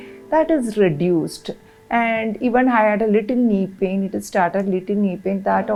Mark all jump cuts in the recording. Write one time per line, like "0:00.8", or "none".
none